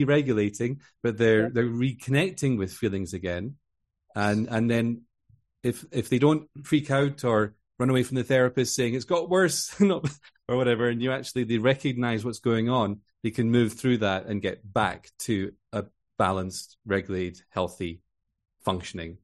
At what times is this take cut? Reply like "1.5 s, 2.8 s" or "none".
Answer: none